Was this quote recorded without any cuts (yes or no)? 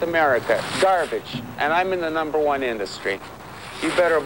yes